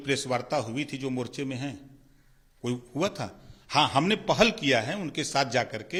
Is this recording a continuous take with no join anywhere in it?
yes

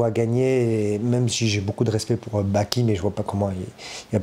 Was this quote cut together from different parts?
no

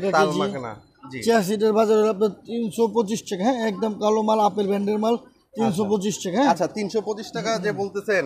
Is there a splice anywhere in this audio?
no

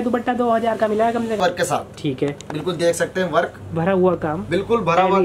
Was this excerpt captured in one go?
no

